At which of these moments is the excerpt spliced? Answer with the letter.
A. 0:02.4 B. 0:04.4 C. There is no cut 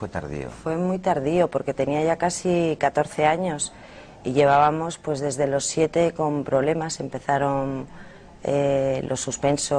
C